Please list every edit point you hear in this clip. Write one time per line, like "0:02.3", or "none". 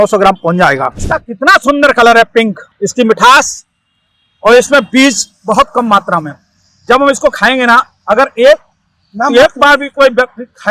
0:01.0
0:02.7